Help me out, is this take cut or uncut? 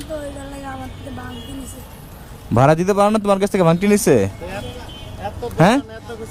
uncut